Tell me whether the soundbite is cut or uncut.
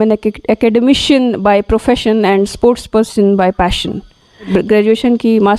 cut